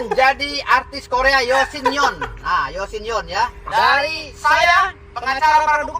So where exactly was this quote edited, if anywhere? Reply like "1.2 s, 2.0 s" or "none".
3.6 s